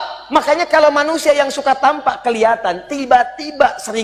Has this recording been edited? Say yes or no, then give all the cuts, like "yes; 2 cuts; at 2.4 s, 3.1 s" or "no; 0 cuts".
no; 0 cuts